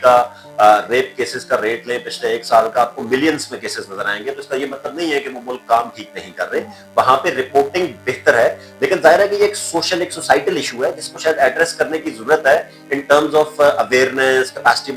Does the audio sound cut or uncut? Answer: uncut